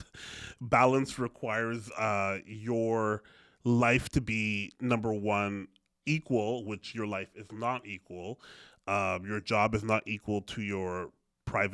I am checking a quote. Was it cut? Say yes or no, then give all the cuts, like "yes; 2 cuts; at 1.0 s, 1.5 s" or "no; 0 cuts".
no; 0 cuts